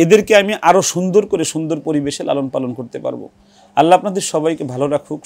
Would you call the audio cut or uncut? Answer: uncut